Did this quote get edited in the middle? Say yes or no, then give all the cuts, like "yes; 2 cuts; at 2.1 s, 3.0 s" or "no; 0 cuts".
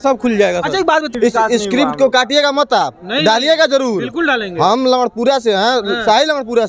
yes; 1 cut; at 1.1 s